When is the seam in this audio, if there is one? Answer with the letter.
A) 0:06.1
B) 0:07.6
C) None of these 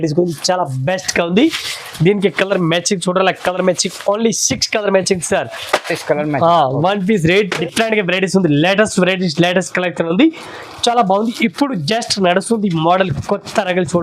B